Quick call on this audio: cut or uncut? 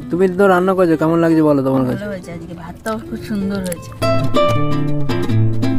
cut